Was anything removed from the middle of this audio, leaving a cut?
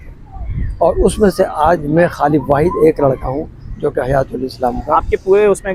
no; 0 cuts

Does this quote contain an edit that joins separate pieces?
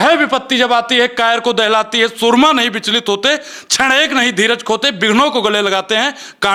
no; 0 cuts

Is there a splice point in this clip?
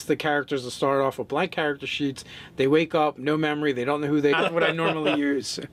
no; 0 cuts

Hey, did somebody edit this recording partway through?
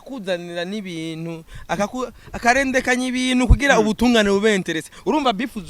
no; 0 cuts

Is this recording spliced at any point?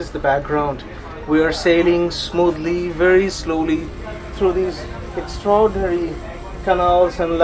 no; 0 cuts

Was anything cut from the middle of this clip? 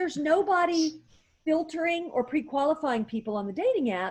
no; 0 cuts

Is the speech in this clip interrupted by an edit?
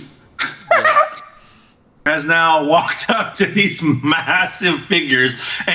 yes; 1 cut; at 2.1 s

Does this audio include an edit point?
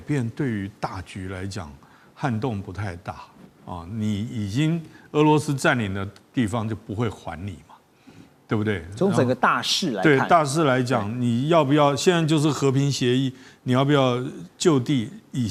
no; 0 cuts

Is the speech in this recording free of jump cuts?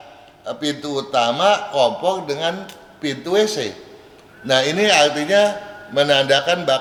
yes; 0 cuts

